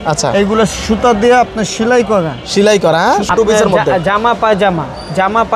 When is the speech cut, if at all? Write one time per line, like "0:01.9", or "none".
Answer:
0:03.3